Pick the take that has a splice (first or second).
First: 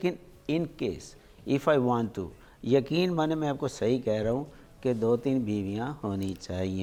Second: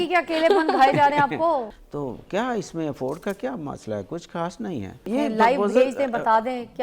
second